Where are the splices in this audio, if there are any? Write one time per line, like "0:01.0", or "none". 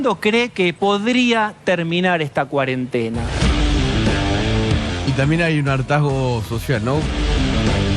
0:05.0
0:07.1